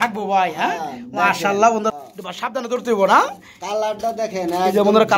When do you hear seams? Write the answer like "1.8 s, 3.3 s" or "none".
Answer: 1.9 s